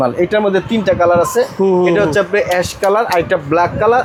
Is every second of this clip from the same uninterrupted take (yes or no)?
yes